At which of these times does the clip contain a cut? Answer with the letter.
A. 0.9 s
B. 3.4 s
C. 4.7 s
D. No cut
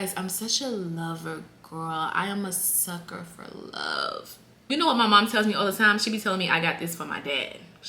C